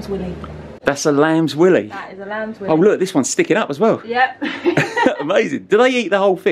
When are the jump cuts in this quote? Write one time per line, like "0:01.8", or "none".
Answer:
none